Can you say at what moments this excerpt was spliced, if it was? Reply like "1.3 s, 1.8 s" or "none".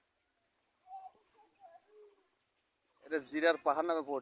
2.9 s